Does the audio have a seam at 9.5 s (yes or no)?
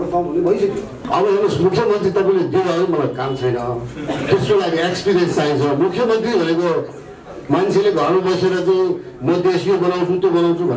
no